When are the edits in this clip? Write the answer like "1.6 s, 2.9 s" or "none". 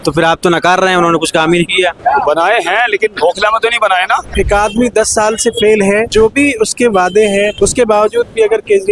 4.3 s, 6.1 s, 7.5 s